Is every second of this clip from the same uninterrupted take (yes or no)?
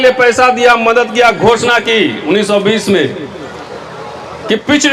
yes